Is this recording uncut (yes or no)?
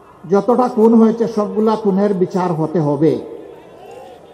yes